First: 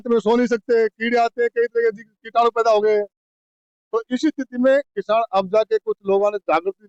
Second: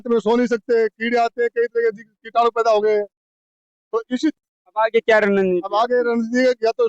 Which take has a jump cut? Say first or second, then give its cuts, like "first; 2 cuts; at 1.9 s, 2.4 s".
second; 1 cut; at 4.4 s